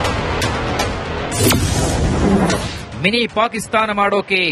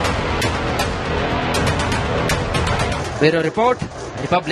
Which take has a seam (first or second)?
first